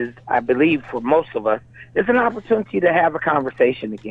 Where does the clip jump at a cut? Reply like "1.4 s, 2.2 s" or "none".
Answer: none